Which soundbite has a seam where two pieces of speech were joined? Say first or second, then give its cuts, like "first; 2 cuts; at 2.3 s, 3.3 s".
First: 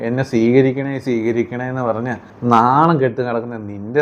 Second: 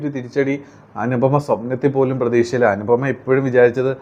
first; 1 cut; at 2.3 s